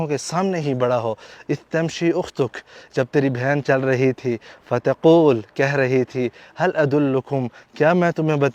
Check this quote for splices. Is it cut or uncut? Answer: uncut